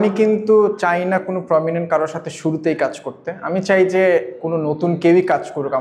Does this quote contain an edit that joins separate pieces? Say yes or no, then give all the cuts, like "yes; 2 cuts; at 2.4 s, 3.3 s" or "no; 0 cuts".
no; 0 cuts